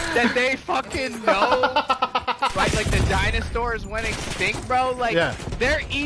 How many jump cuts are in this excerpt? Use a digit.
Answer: 0